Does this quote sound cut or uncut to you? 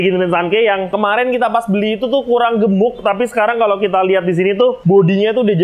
cut